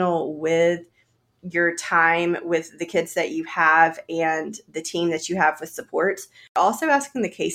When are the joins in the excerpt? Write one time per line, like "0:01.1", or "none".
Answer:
0:06.5